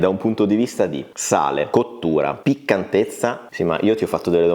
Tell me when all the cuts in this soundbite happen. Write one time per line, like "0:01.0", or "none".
0:03.4

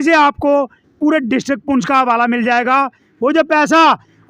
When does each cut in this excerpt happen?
0:03.0

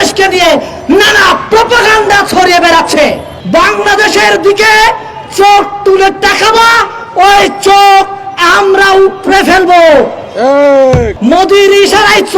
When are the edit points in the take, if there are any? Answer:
0:03.3
0:11.1

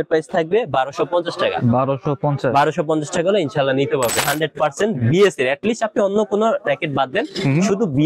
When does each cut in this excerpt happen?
0:04.2

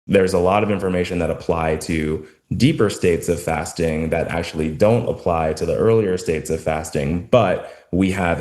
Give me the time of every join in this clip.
none

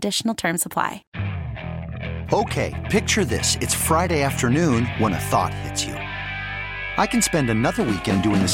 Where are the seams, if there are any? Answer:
0:01.0

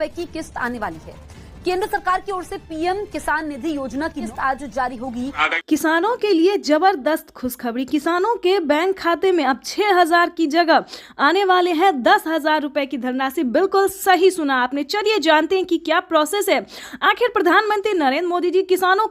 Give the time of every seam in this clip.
0:05.4

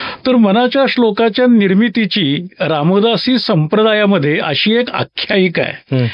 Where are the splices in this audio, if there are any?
none

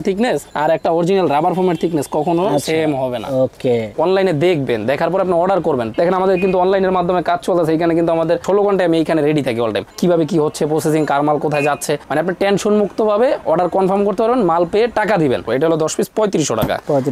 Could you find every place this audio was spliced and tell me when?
0:03.9
0:05.9
0:15.5

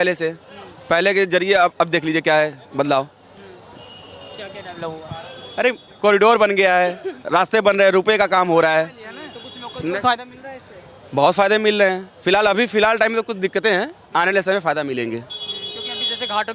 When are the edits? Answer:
none

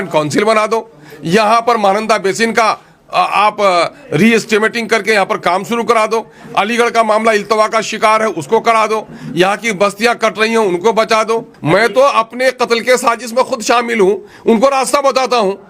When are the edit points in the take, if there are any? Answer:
0:11.5

